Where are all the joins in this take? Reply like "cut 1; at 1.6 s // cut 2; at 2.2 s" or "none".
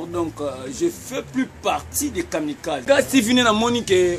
cut 1; at 2.8 s